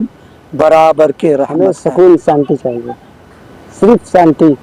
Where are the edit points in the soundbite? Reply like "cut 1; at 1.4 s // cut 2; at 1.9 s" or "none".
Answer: cut 1; at 1.5 s

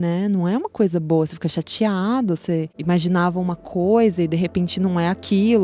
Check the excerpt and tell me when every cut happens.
cut 1; at 2.7 s

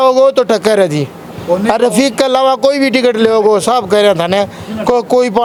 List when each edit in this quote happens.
none

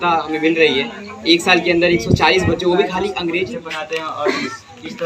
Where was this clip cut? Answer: cut 1; at 3.5 s

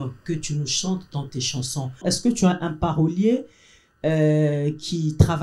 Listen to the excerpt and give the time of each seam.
cut 1; at 2.0 s

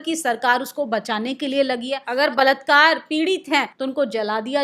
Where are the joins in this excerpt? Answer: cut 1; at 2.0 s // cut 2; at 3.7 s

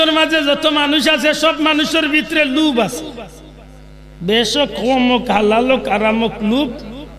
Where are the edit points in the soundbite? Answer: none

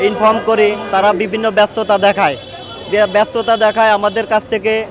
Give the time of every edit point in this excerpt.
none

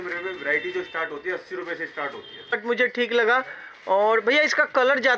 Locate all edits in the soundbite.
cut 1; at 2.6 s

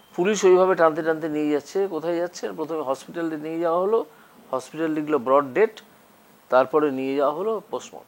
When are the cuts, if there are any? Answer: none

